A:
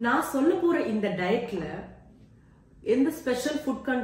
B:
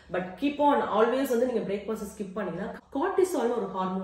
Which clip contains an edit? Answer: B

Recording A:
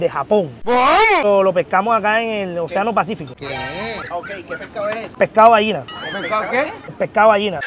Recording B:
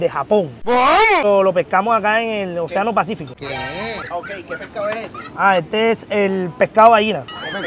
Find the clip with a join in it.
A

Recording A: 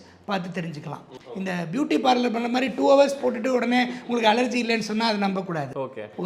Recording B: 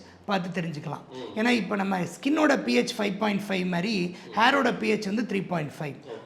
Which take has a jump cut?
A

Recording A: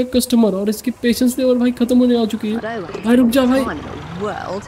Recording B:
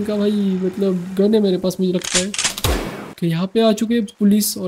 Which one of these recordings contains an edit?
B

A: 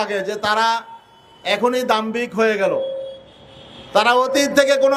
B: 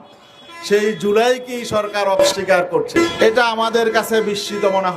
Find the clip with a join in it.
B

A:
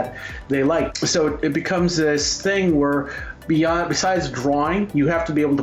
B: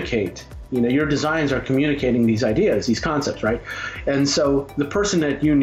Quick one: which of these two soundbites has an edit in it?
A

